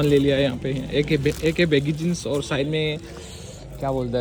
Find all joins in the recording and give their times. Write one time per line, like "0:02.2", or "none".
none